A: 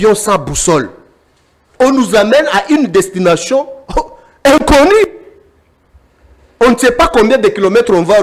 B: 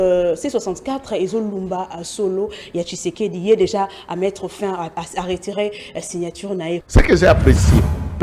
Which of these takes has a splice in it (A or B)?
B